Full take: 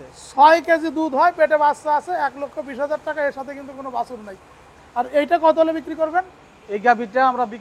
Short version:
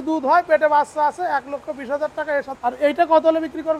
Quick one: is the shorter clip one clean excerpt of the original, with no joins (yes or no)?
no